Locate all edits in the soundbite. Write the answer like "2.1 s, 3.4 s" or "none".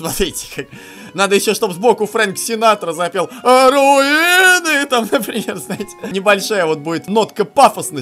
6.0 s, 7.0 s